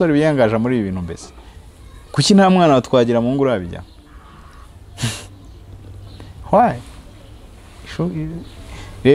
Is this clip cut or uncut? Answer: uncut